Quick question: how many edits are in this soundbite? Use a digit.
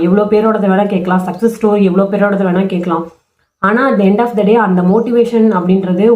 0